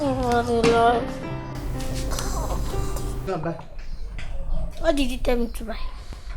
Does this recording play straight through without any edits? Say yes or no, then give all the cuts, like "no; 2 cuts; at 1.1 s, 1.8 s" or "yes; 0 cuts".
no; 1 cut; at 3.3 s